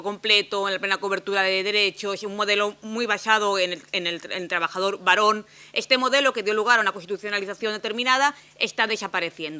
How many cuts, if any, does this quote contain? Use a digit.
1